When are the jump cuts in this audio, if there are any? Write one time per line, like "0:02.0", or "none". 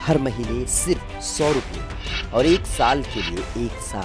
none